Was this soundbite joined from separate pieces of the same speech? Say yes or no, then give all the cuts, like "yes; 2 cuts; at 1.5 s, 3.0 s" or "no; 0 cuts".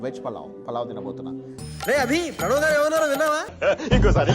yes; 1 cut; at 1.4 s